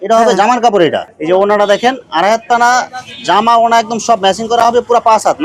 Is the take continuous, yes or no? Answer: no